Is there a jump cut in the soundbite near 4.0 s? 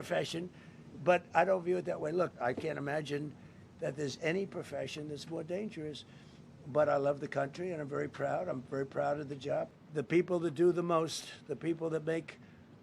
no; 2 cuts; at 2.3 s, 9.8 s

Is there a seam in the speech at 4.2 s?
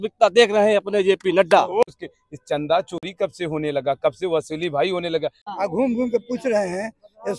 no; 2 cuts; at 1.8 s, 5.4 s

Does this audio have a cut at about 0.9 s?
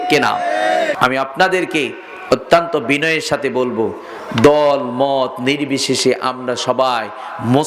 yes; 1 cut; at 0.9 s

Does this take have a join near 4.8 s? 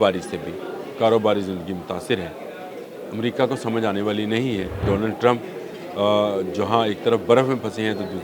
yes; 1 cut; at 4.8 s

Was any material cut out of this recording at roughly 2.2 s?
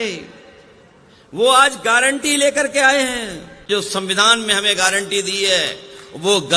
no; 1 cut; at 3.7 s

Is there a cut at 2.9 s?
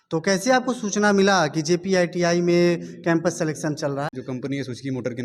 no; 1 cut; at 4.2 s

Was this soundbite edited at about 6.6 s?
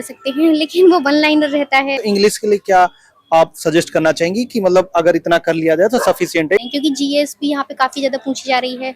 yes; 2 cuts; at 2.0 s, 6.6 s

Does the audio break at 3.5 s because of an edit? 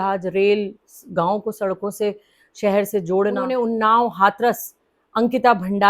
yes; 1 cut; at 3.5 s

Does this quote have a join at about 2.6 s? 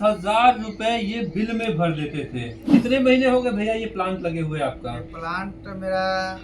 yes; 1 cut; at 2.6 s

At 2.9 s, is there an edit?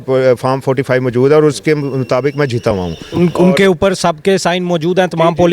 no; 0 cuts

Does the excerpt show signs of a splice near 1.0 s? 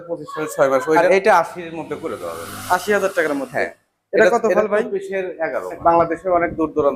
yes; 2 cuts; at 1.0 s, 5.8 s

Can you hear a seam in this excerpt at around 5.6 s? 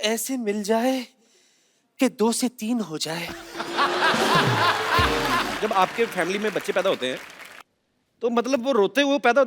yes; 1 cut; at 5.6 s

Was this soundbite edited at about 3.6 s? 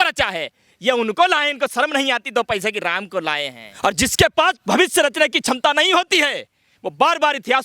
yes; 1 cut; at 3.6 s

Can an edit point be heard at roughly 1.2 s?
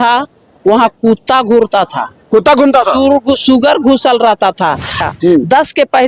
no; 1 cut; at 5.1 s

